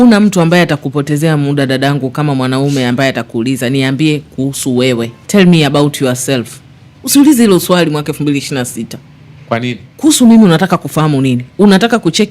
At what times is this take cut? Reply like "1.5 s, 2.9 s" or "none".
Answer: 5.2 s, 9.9 s